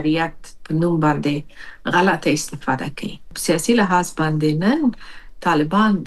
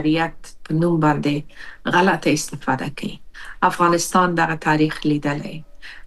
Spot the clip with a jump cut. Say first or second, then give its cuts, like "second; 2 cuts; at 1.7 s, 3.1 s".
first; 1 cut; at 3.3 s